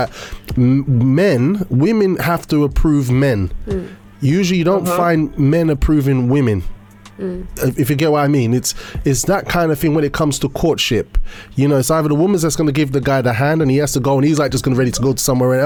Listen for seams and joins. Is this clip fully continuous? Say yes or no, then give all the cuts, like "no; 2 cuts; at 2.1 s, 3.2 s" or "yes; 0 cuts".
yes; 0 cuts